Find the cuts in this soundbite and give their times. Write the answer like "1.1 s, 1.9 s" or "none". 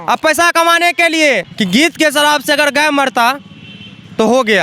1.5 s